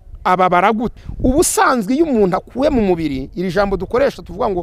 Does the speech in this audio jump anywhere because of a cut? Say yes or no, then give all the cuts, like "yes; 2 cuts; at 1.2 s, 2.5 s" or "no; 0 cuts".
yes; 1 cut; at 1.0 s